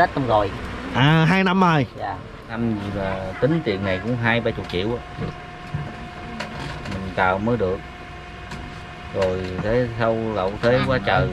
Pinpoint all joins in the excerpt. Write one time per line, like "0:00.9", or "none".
0:02.5